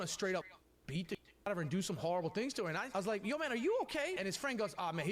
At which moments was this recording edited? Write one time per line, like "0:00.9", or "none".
0:02.9
0:04.1